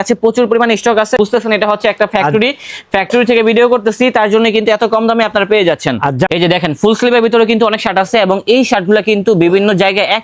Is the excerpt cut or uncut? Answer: cut